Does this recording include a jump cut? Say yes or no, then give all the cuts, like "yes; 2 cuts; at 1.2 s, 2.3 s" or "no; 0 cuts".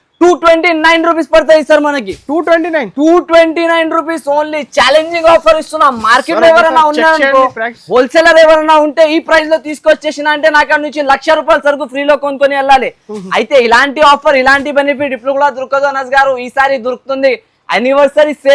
no; 0 cuts